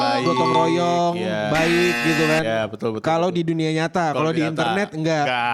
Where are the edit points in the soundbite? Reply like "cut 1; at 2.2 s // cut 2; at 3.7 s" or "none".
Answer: none